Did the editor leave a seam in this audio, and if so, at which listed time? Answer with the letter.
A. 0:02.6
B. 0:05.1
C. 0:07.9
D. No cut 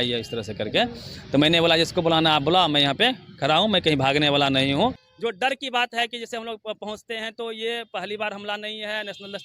B